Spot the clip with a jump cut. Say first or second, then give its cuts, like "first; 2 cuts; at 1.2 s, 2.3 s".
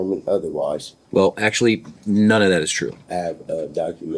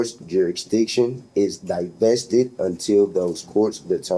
first; 2 cuts; at 0.9 s, 3.0 s